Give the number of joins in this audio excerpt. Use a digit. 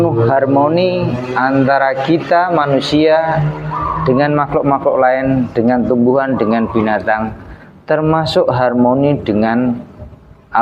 0